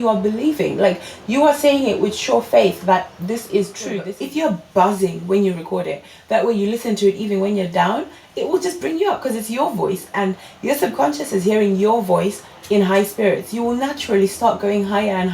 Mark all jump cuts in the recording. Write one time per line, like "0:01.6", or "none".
0:04.1

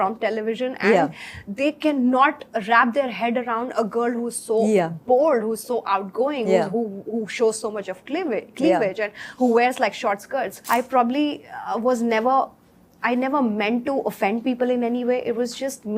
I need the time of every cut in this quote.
0:10.6

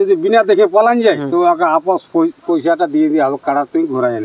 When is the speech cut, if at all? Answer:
0:01.2

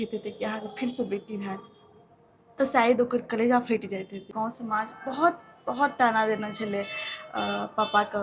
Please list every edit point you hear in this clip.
0:04.3

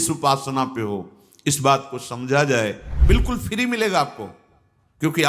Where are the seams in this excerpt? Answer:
0:02.9

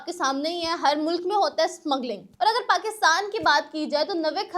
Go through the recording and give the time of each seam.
0:02.4

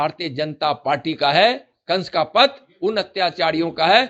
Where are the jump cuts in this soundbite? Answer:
none

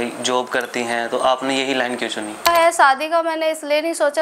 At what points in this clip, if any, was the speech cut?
0:02.5

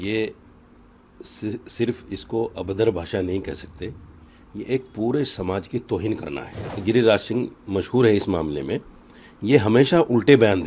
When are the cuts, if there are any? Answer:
0:06.7

